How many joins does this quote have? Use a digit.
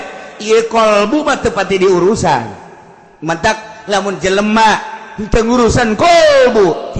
0